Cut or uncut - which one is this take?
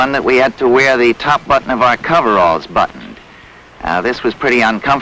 cut